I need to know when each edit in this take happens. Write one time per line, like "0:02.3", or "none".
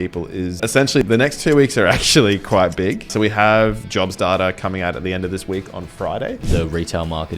0:00.9
0:03.1
0:06.4